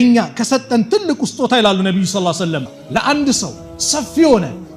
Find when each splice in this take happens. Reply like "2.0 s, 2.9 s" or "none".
2.7 s